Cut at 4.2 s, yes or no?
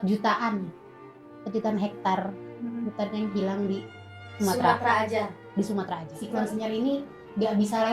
no